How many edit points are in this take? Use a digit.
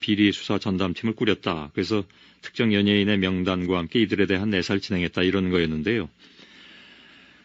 1